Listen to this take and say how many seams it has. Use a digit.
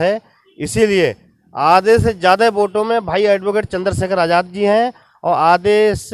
0